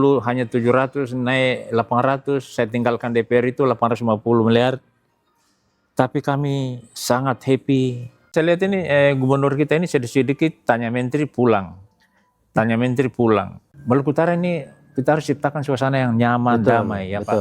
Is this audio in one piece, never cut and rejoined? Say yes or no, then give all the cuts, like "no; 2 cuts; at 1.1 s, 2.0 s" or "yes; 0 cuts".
no; 2 cuts; at 8.3 s, 13.7 s